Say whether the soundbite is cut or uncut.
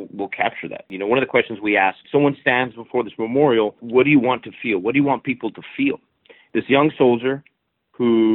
cut